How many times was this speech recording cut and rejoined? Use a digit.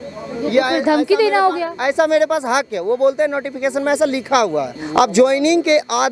1